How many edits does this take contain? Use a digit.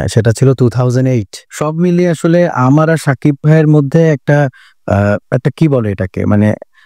1